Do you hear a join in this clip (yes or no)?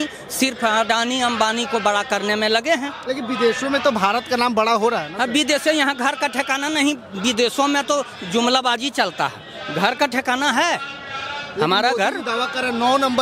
no